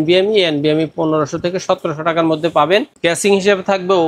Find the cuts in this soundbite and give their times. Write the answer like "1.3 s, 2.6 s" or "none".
2.9 s